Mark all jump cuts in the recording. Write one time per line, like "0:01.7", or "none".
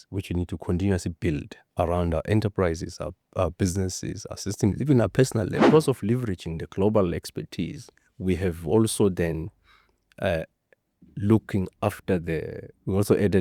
0:05.7